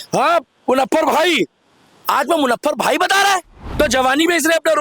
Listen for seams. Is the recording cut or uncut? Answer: cut